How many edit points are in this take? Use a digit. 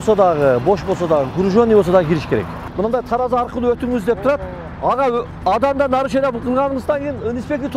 1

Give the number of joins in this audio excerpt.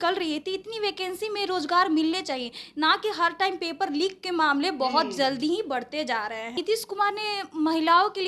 1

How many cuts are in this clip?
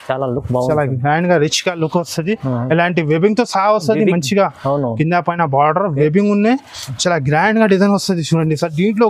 0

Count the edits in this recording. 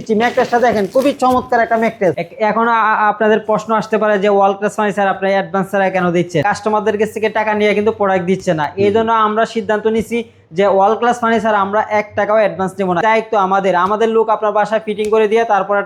3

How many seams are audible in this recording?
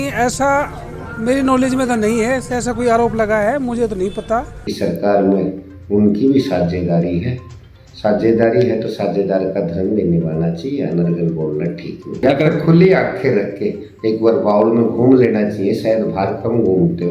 2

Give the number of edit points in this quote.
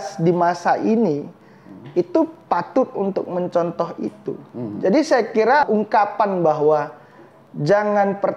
1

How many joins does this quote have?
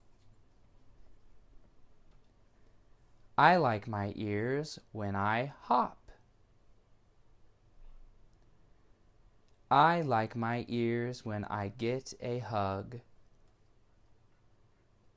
0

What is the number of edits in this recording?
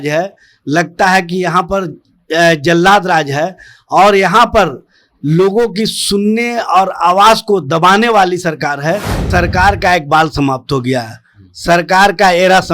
1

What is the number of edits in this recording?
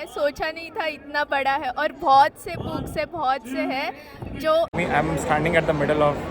1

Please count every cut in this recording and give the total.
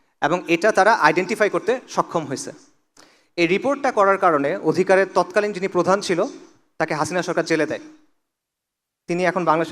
0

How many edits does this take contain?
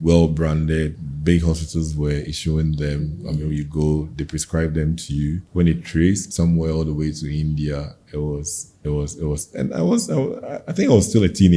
3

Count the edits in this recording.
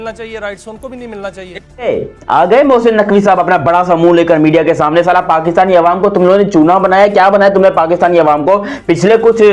1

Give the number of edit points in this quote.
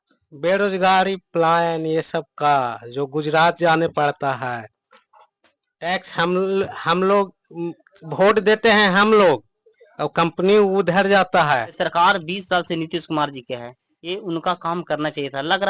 1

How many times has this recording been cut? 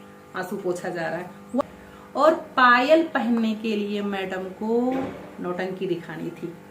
1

